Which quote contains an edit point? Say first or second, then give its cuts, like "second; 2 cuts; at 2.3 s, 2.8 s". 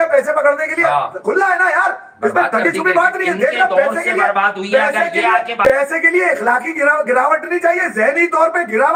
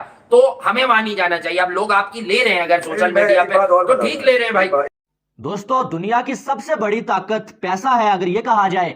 second; 1 cut; at 4.9 s